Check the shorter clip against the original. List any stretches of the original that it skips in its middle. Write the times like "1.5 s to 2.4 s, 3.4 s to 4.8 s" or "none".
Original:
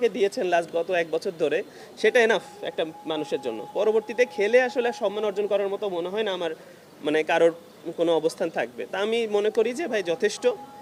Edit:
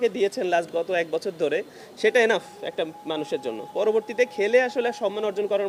none